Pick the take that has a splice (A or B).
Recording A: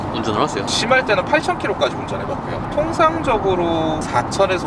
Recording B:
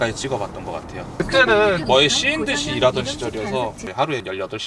B